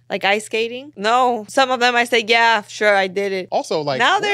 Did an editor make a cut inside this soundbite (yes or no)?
yes